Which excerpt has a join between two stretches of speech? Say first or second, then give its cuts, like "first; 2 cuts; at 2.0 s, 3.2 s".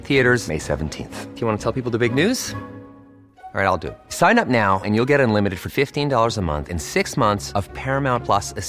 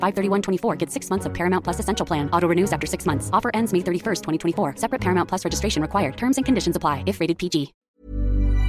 second; 1 cut; at 7.8 s